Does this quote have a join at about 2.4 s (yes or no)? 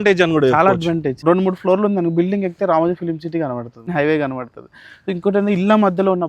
no